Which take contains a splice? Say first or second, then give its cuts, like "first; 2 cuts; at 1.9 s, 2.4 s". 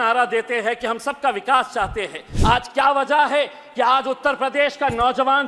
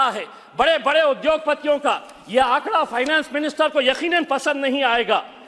first; 1 cut; at 2.3 s